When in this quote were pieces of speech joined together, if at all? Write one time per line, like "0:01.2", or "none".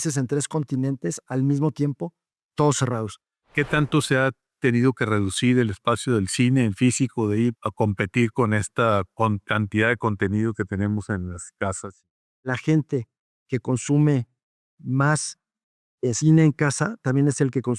0:03.4
0:07.6
0:12.4